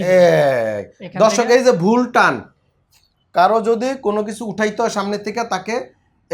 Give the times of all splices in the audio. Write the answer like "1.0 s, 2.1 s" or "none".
none

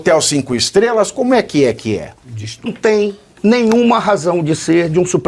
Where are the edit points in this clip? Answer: 2.7 s

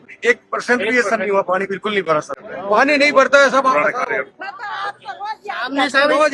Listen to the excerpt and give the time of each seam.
2.4 s

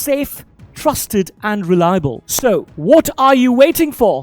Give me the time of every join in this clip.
2.2 s

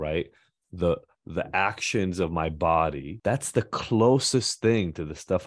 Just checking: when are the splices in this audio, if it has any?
3.1 s

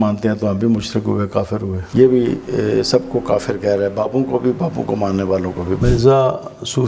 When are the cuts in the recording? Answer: 1.8 s, 5.8 s

